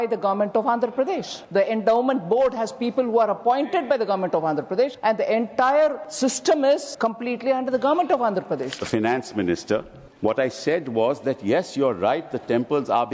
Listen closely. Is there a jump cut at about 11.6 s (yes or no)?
no